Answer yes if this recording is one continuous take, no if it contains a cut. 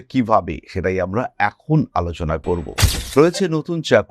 no